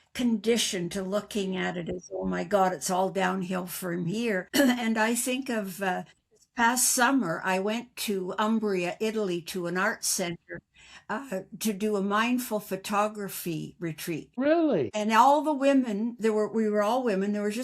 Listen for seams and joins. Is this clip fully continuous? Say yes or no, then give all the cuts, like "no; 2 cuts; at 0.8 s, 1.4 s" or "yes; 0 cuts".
no; 2 cuts; at 4.5 s, 14.7 s